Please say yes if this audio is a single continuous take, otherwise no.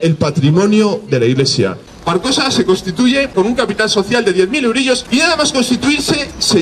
no